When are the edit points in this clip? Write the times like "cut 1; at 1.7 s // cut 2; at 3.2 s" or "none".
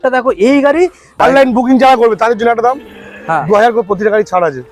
cut 1; at 1.1 s